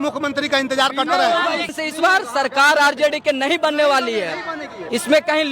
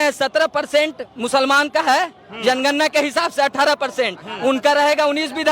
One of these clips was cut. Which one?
first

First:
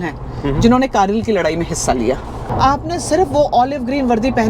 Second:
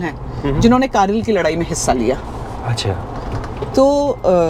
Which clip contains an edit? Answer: first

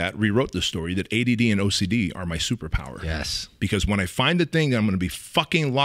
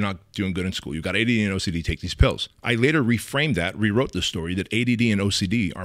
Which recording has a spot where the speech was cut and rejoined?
second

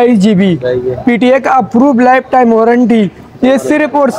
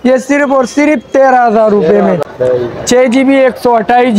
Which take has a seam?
second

